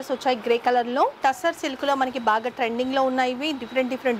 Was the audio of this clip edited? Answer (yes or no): yes